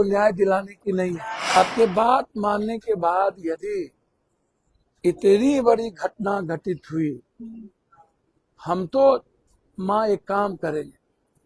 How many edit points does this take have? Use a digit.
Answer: 1